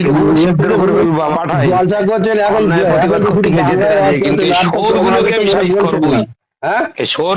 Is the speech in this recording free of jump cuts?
no; 1 cut; at 1.3 s

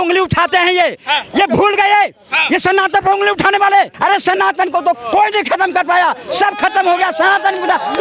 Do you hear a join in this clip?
yes; 1 cut; at 3.9 s

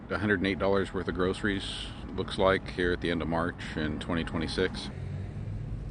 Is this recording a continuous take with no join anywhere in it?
no; 1 cut; at 4.8 s

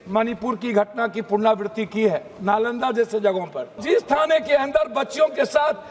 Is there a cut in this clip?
yes; 1 cut; at 3.8 s

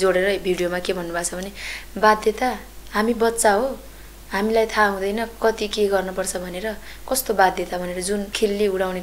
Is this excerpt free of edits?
yes; 0 cuts

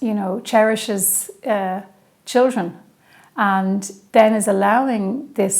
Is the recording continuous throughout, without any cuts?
no; 1 cut; at 4.0 s

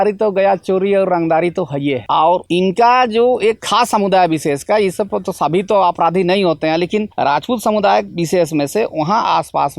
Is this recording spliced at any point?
no; 0 cuts

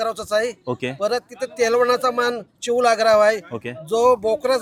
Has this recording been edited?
no; 0 cuts

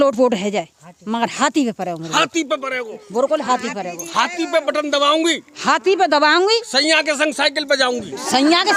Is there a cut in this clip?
no; 0 cuts

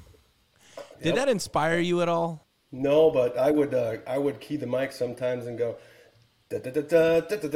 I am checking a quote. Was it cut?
no; 0 cuts

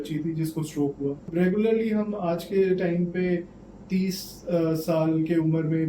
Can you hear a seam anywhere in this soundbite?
yes; 1 cut; at 1.3 s

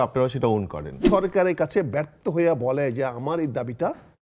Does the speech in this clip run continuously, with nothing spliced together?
no; 1 cut; at 1.0 s

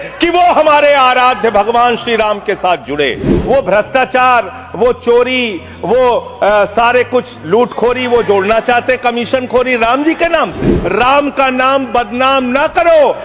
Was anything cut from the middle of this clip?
no; 0 cuts

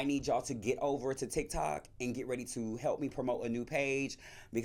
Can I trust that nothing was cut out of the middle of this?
yes; 0 cuts

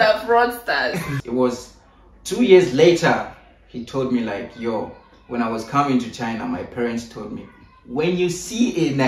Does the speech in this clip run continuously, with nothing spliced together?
no; 1 cut; at 1.1 s

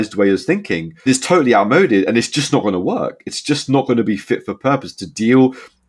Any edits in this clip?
yes; 1 cut; at 1.1 s

